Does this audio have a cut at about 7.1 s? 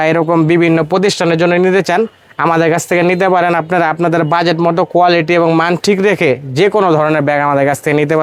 no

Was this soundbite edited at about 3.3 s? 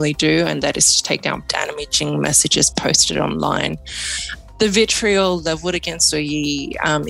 no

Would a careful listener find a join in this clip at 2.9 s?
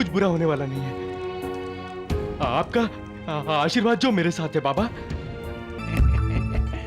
no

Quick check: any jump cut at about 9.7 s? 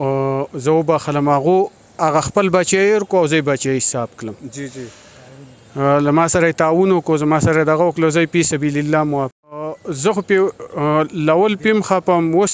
yes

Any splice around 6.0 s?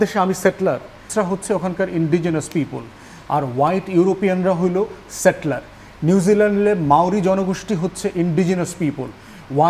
no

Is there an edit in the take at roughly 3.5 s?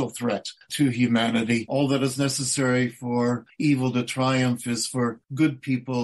no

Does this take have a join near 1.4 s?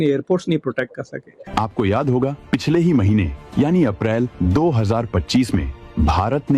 yes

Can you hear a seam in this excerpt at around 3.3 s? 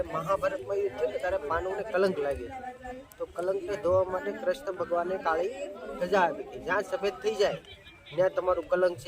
no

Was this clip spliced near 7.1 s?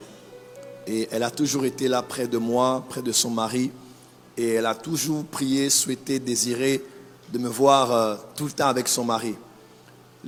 no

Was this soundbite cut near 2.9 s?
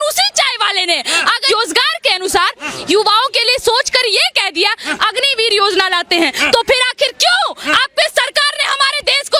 no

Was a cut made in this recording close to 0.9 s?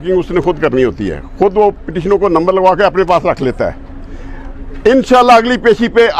no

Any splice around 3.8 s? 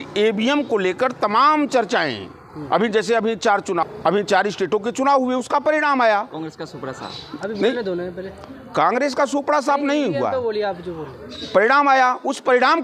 yes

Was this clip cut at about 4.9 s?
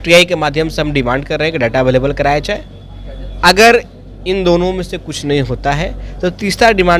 no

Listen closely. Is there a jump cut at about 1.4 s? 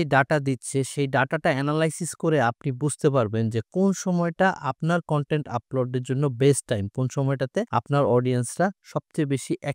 no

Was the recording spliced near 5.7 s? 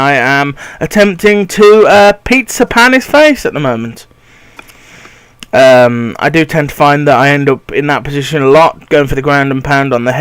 yes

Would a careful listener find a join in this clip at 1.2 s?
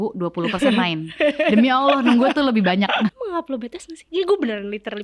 no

